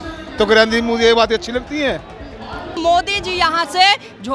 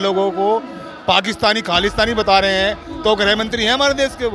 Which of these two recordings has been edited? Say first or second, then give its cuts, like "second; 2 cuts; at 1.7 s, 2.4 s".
first; 1 cut; at 2.8 s